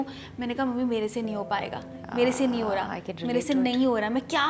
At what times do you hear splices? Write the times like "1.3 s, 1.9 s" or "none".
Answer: none